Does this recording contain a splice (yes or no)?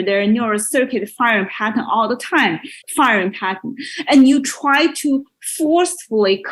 yes